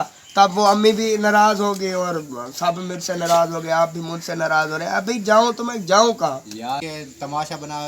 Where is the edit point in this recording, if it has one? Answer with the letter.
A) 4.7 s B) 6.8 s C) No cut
B